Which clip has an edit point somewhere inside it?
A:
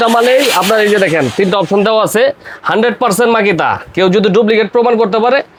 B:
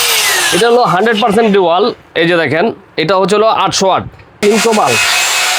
B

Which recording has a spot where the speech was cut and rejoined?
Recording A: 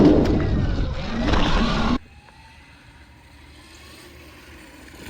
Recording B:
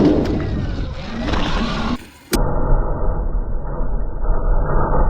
B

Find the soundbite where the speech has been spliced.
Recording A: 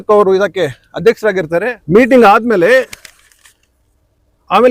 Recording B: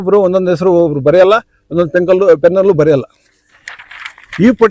A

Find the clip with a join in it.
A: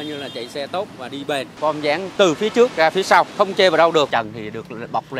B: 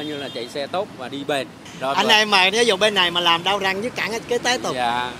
A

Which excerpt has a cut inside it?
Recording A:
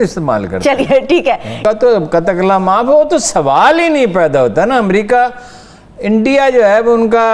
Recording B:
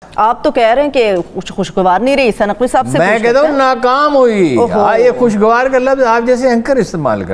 A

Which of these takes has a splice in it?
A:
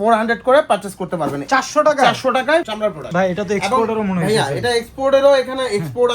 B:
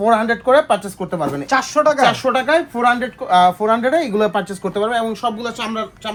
A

